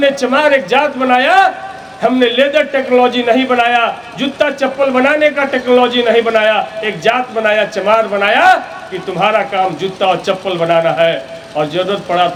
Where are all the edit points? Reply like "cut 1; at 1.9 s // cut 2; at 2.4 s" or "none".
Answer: none